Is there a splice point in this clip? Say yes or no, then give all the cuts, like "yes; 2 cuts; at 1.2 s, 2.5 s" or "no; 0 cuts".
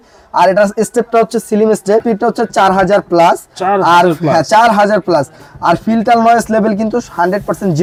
no; 0 cuts